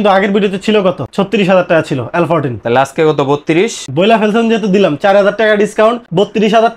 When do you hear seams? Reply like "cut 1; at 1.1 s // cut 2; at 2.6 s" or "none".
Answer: none